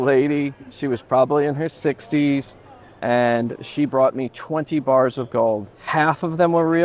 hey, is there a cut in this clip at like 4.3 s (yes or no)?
no